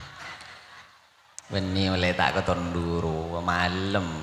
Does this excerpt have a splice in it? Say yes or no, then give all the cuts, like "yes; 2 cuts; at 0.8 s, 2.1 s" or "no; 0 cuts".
no; 0 cuts